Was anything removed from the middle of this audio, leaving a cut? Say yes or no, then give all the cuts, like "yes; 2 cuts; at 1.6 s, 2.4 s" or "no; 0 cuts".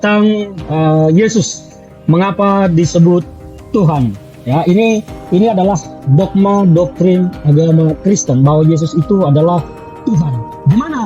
no; 0 cuts